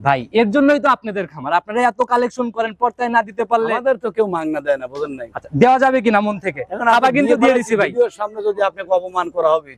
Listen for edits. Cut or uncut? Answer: uncut